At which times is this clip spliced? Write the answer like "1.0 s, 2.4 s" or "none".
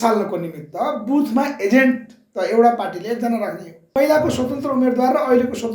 3.9 s